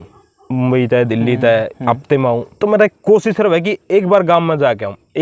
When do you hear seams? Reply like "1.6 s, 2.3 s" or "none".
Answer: none